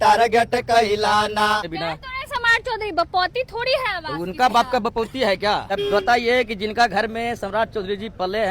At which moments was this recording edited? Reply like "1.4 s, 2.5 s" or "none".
1.7 s, 5.7 s